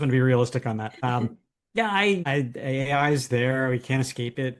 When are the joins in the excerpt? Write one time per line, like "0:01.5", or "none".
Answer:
0:01.3
0:02.2